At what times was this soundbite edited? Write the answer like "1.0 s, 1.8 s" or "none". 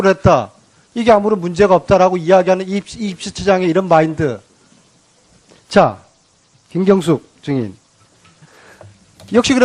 none